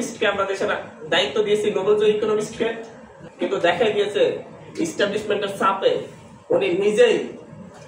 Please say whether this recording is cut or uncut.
cut